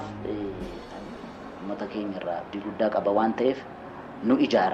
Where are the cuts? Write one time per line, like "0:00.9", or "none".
0:01.1